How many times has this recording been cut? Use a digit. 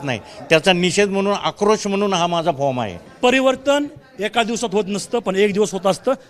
1